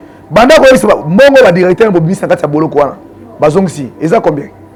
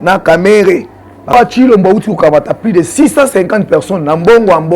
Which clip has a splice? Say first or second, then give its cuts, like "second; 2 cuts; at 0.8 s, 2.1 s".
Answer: second; 1 cut; at 1.3 s